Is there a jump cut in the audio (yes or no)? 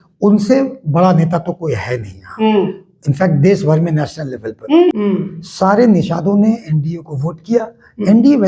yes